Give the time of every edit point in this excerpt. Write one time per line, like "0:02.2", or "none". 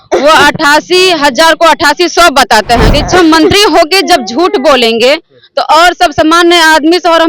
0:02.9